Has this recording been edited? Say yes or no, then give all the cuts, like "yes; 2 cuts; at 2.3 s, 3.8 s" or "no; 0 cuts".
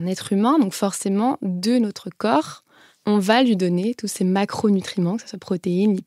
no; 0 cuts